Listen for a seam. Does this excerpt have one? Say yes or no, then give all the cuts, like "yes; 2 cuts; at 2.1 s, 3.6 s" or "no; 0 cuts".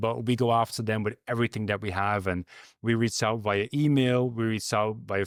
no; 0 cuts